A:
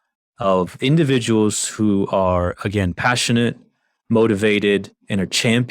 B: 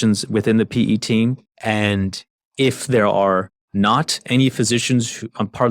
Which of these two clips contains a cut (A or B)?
B